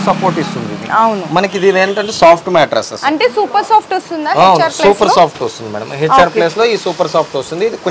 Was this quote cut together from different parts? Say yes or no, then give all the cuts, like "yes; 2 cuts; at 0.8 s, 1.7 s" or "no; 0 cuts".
no; 0 cuts